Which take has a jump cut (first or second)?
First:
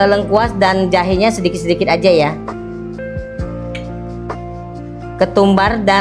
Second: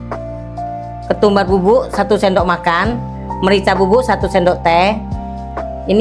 second